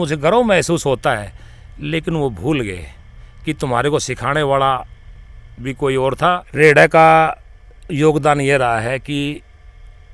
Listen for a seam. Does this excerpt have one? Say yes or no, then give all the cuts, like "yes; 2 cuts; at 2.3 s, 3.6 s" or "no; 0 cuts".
yes; 1 cut; at 6.5 s